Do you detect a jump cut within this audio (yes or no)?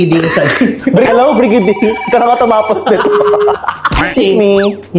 yes